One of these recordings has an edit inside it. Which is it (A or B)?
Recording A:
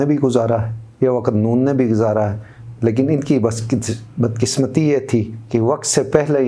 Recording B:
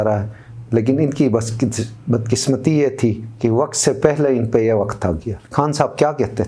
B